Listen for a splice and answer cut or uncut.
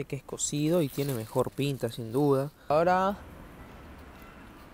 cut